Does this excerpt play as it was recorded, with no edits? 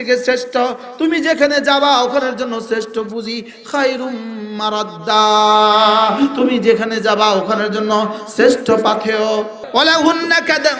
no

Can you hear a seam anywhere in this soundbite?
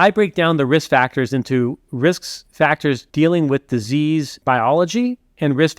yes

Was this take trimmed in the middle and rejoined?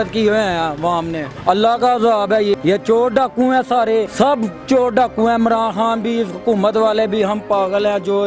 yes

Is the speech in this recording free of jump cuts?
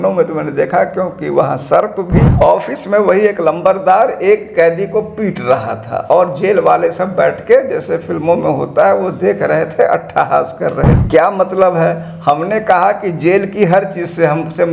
no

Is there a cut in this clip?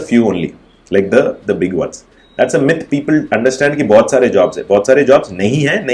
no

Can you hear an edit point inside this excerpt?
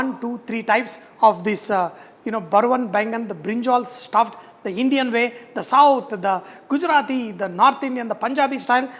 no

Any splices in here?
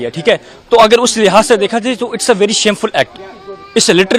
no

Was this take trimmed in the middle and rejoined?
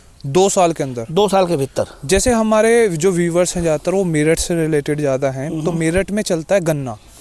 no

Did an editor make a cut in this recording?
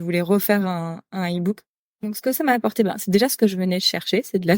yes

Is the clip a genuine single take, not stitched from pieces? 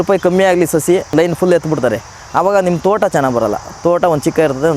no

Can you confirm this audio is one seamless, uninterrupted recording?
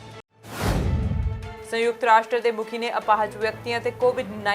no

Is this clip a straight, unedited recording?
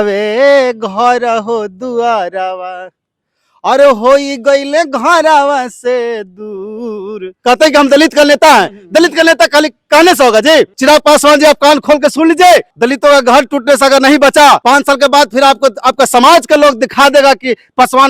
no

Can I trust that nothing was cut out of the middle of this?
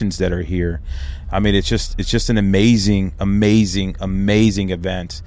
yes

